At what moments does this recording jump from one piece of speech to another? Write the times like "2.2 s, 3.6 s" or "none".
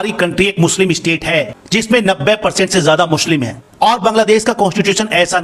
none